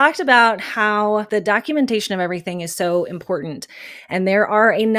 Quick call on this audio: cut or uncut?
cut